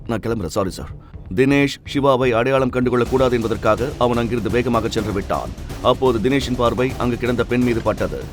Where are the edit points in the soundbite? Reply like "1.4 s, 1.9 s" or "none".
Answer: none